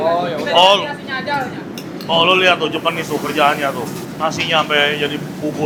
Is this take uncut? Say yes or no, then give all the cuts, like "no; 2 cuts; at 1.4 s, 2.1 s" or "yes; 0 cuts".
yes; 0 cuts